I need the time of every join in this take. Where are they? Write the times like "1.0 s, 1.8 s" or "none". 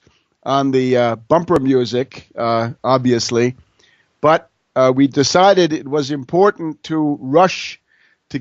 none